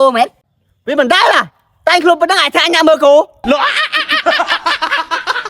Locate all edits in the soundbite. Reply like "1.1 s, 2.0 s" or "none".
3.4 s